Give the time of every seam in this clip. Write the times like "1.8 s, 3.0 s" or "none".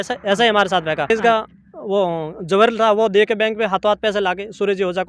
1.1 s

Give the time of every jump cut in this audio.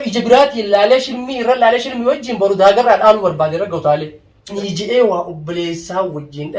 4.5 s

